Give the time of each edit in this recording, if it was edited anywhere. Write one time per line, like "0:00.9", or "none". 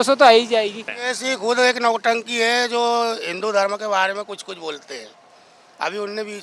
0:01.0